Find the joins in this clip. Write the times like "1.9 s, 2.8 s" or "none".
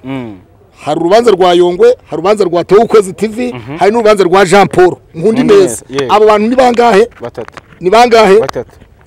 none